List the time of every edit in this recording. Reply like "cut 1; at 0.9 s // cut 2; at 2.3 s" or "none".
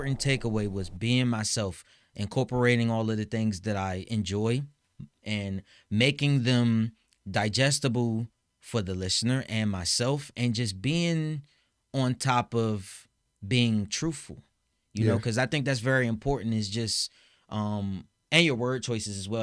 none